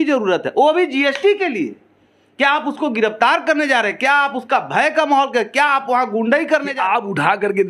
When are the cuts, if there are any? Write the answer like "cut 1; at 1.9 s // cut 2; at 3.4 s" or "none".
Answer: cut 1; at 6.7 s